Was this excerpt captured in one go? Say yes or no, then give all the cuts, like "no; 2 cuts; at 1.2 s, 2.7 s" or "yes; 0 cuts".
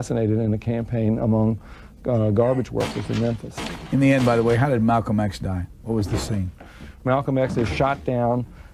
no; 1 cut; at 6.8 s